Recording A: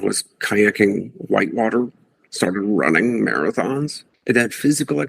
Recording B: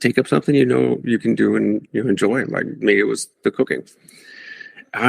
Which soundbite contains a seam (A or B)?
A